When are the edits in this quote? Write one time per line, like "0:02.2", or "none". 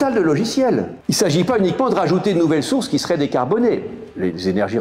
0:01.0